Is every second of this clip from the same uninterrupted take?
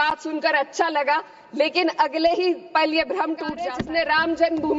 no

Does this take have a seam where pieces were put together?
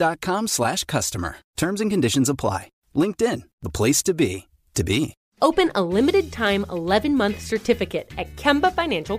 yes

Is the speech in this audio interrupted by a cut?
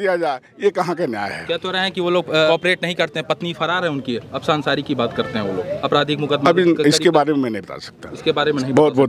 yes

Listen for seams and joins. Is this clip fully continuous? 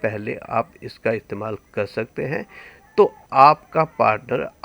no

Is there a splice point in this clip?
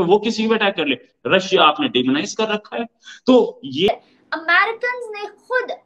yes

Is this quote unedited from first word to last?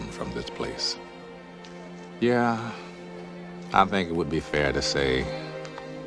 no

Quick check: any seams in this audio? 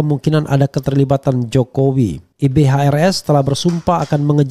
yes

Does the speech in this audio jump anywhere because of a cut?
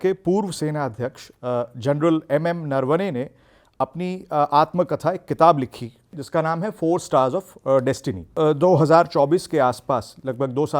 yes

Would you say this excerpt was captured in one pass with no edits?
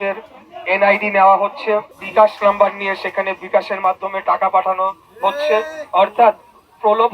no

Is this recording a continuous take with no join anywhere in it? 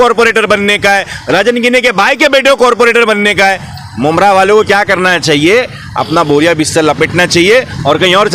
yes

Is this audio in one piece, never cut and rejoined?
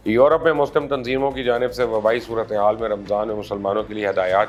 yes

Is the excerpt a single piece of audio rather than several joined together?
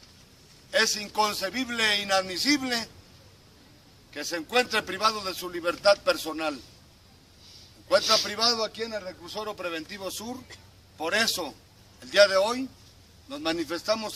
yes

